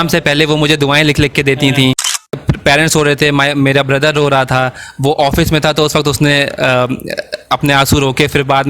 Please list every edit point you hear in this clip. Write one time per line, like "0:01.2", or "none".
0:02.4